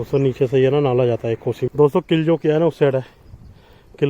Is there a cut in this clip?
yes; 1 cut; at 1.7 s

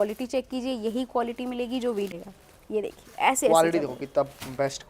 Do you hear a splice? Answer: yes; 1 cut; at 2.1 s

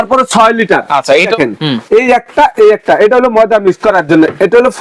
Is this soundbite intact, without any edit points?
no; 1 cut; at 1.3 s

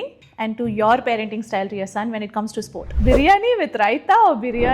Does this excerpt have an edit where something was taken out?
yes; 1 cut; at 2.9 s

